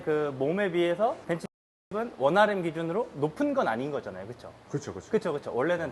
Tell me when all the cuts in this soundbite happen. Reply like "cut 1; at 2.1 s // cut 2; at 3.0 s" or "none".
cut 1; at 1.8 s

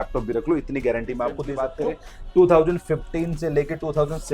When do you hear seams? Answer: cut 1; at 1.5 s

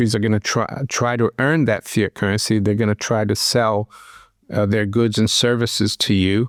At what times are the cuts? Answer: none

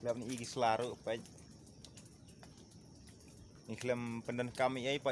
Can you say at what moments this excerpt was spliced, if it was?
cut 1; at 3.5 s

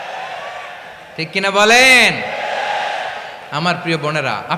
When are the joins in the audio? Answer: none

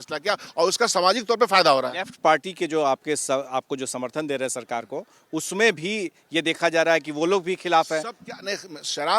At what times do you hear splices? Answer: none

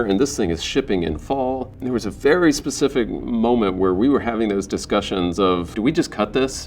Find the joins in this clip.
cut 1; at 1.7 s // cut 2; at 5.7 s

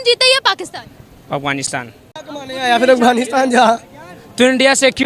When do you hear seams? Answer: cut 1; at 2.1 s

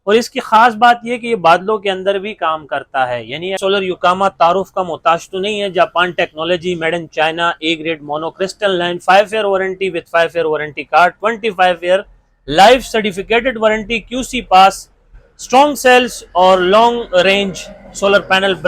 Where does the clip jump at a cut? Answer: cut 1; at 3.6 s

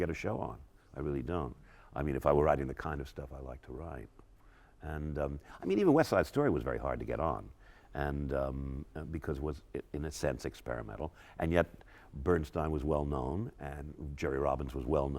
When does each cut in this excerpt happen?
none

